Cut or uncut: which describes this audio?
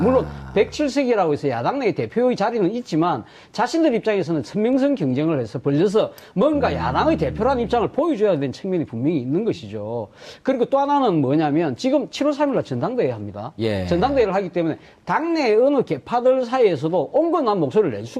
cut